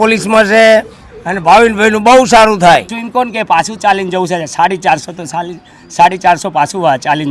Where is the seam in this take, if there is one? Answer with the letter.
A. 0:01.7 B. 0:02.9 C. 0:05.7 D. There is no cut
B